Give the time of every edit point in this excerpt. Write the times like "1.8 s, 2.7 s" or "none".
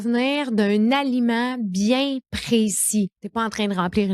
3.2 s